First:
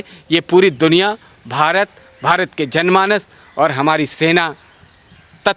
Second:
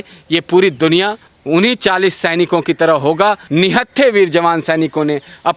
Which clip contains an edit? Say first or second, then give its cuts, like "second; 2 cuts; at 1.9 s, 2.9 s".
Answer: second; 2 cuts; at 1.3 s, 3.4 s